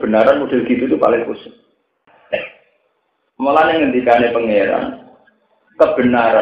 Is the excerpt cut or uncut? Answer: cut